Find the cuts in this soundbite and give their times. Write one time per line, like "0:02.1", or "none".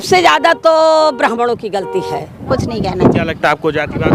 0:02.5